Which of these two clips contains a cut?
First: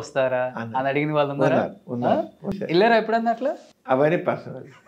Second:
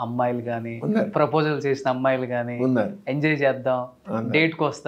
first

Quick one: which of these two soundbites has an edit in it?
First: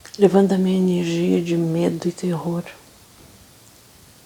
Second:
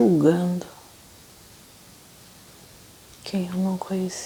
first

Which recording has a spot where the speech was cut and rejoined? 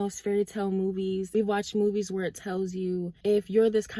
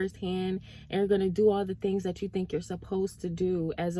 first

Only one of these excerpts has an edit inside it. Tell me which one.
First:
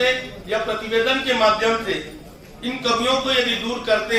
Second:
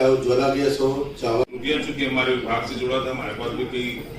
second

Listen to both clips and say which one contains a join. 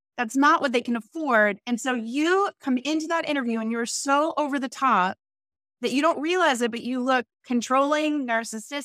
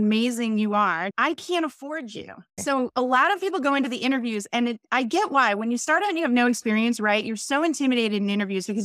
second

